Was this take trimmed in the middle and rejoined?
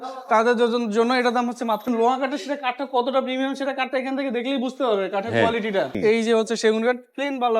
yes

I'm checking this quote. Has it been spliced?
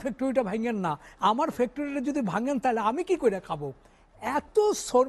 no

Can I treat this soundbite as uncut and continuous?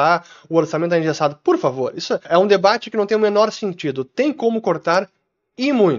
no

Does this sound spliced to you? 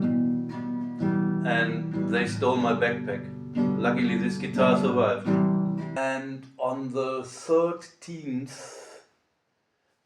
yes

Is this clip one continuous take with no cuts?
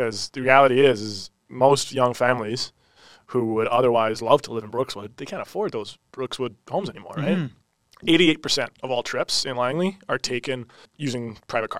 no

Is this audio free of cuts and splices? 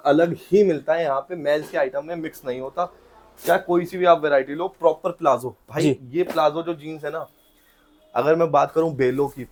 yes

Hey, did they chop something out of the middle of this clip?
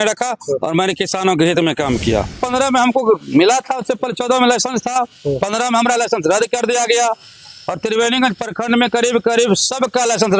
yes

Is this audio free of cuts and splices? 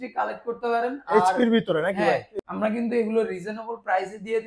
no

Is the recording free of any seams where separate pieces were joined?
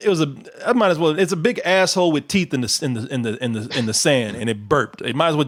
yes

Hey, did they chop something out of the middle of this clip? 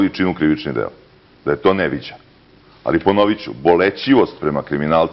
yes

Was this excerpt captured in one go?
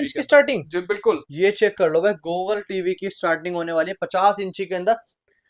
yes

